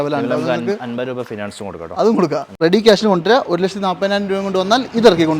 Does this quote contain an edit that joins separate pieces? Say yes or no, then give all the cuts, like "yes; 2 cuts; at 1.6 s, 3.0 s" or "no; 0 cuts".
yes; 1 cut; at 2.5 s